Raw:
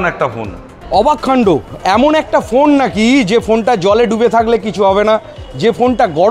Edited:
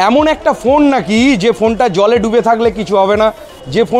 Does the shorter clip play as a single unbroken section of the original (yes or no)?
yes